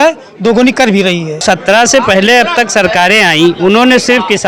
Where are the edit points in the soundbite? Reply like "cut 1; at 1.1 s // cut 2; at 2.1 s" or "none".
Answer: cut 1; at 1.4 s